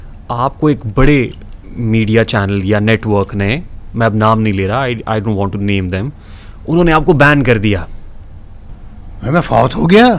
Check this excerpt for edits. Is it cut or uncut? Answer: uncut